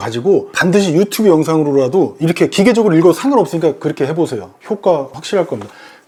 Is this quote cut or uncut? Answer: uncut